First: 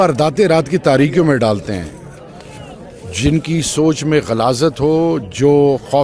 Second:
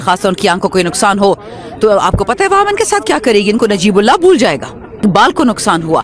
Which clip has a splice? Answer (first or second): second